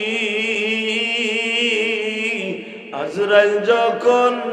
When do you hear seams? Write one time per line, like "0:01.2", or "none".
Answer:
0:02.8